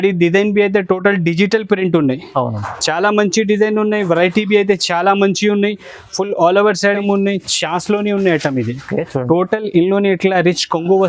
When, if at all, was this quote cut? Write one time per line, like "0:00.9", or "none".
0:07.0